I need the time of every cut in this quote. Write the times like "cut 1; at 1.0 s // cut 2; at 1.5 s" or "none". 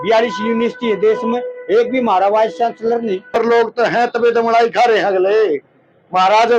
cut 1; at 3.4 s